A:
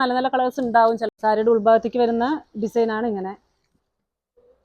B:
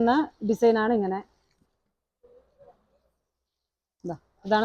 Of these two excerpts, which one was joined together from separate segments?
A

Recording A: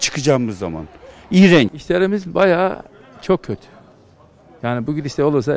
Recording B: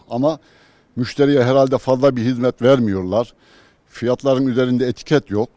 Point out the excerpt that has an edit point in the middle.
A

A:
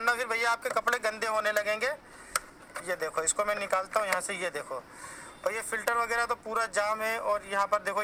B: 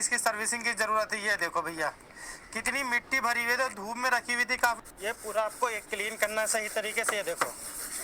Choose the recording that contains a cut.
B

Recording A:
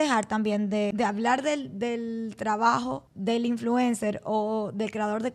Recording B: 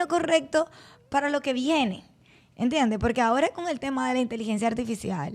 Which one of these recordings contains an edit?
A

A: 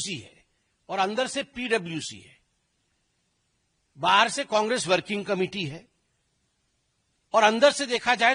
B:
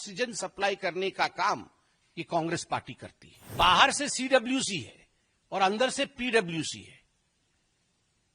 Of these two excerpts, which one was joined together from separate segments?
B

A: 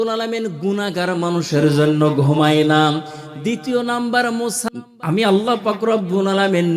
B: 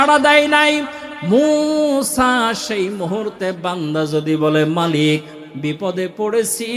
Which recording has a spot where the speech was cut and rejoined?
A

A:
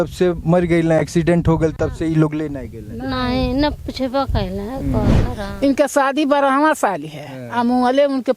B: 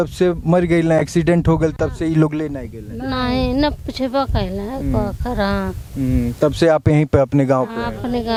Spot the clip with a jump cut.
A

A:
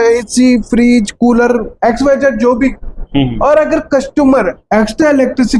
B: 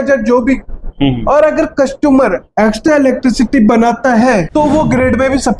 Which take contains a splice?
B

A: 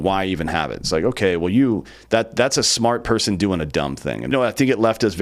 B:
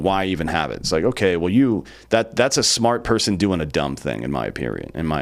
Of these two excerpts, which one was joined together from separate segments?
A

